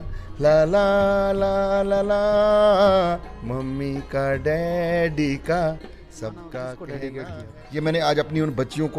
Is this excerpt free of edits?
no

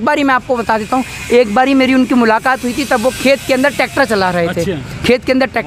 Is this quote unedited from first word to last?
yes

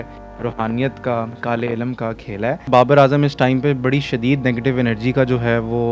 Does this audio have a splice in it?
yes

